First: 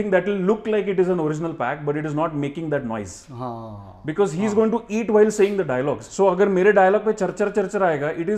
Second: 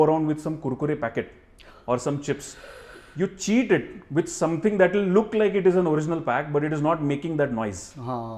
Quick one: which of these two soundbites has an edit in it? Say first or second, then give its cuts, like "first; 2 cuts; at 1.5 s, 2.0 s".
first; 1 cut; at 6.0 s